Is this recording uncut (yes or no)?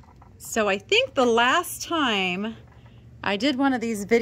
yes